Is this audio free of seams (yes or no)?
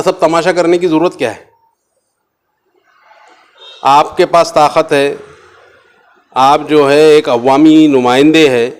yes